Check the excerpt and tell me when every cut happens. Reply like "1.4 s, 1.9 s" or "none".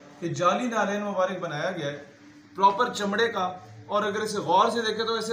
none